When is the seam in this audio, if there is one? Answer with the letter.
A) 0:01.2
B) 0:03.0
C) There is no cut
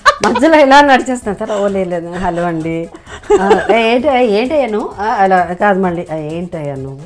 C